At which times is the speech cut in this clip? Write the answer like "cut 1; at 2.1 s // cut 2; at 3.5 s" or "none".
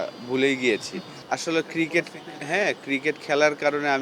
cut 1; at 1.1 s